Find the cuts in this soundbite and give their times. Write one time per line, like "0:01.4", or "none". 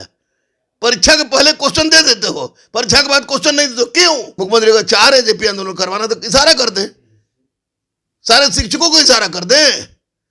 0:04.3